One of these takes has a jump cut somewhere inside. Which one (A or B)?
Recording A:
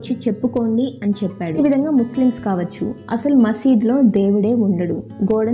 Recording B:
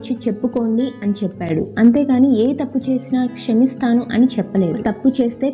A